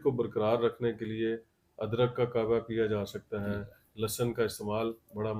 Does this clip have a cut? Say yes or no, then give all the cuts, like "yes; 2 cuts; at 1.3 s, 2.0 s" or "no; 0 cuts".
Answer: no; 0 cuts